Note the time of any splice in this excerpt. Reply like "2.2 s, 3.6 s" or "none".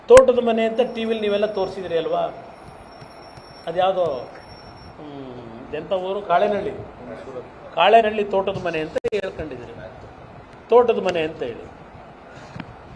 5.4 s